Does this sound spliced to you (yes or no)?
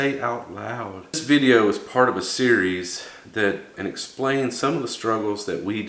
yes